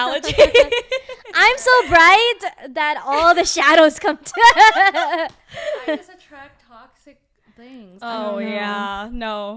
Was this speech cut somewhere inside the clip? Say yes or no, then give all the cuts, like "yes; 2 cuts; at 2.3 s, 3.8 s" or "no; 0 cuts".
no; 0 cuts